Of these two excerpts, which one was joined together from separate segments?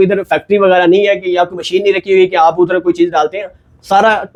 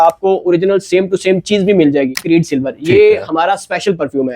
second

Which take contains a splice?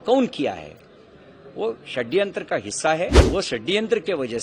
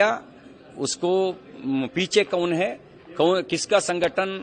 first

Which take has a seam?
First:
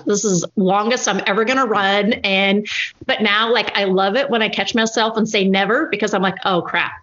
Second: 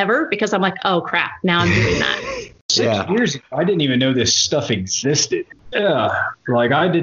second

